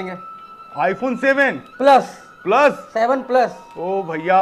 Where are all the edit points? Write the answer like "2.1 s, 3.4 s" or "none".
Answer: none